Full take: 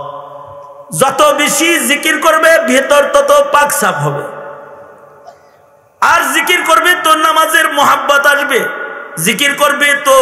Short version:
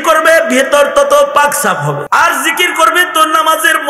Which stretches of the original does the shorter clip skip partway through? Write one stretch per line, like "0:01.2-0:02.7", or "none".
0:04.2-0:06.0